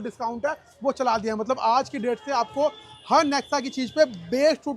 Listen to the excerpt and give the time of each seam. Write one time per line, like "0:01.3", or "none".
none